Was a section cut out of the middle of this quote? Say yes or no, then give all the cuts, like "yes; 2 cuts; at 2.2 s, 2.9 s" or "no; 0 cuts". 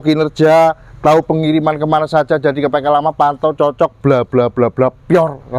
no; 0 cuts